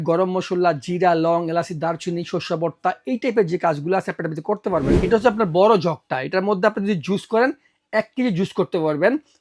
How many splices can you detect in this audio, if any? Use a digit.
1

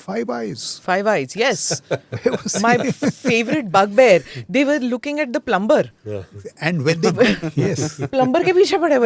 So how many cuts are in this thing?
0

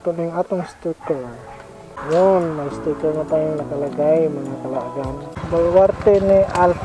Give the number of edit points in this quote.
2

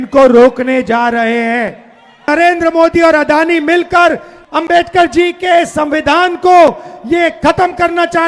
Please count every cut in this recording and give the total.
2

